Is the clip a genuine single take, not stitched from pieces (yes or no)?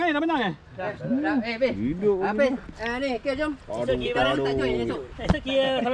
yes